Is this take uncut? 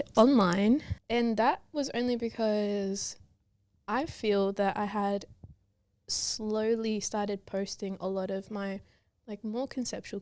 no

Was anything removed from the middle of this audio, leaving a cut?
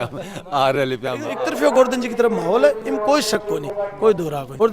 yes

